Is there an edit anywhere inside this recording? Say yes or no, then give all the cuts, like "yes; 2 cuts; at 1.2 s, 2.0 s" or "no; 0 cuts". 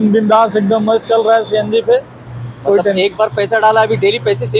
no; 0 cuts